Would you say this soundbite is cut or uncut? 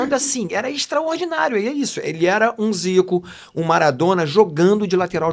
uncut